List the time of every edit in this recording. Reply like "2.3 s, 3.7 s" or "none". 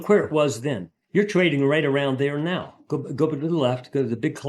0.9 s